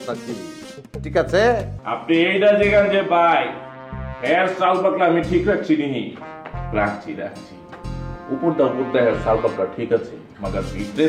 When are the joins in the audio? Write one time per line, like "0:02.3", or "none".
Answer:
0:01.8

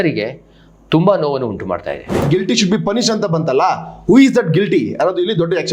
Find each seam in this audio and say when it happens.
0:02.3

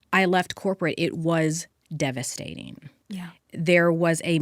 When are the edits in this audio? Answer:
none

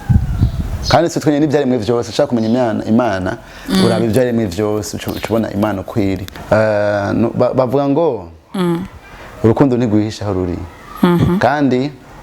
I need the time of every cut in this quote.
0:06.3

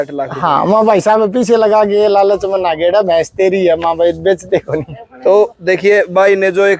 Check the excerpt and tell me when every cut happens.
none

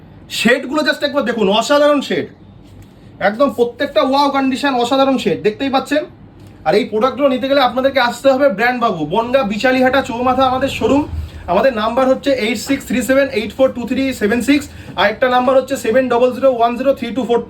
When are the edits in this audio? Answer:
none

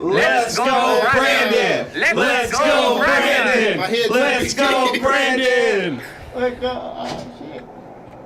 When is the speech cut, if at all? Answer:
none

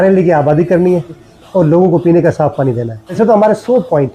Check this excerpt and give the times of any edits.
0:01.3
0:03.1

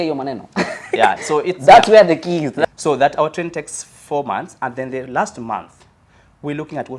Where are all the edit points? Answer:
0:02.5

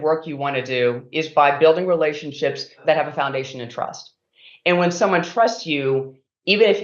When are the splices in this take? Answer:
0:02.8

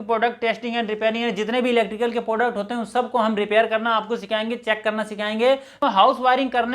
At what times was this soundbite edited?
0:05.8

